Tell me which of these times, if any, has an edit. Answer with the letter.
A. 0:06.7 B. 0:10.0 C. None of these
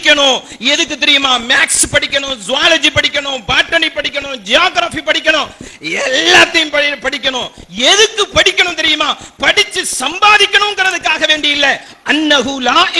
C